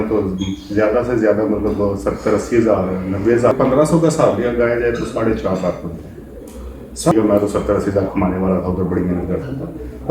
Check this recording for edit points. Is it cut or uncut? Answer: cut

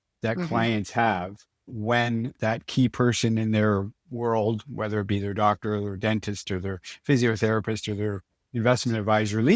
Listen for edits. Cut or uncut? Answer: uncut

